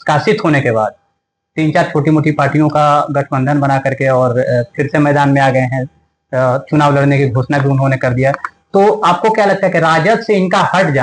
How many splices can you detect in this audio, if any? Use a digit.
0